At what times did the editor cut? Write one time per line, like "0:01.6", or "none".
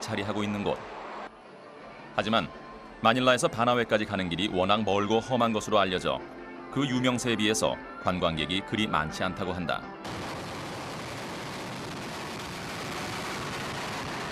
0:09.0